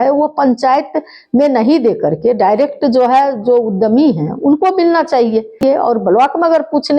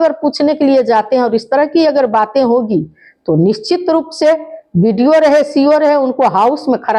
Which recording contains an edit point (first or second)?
first